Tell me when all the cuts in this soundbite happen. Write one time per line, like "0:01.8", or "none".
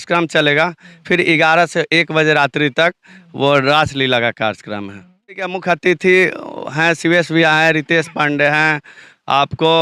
0:05.3